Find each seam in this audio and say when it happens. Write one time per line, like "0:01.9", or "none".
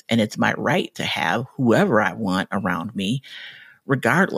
none